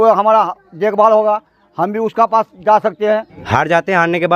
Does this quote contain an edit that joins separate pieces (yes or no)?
yes